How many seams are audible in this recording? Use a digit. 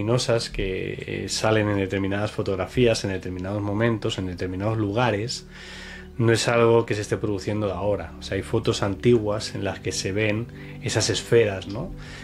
0